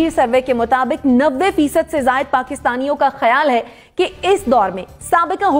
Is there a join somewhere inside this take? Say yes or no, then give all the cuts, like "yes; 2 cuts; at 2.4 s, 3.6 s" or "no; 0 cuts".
no; 0 cuts